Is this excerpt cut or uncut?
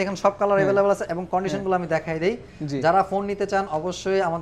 uncut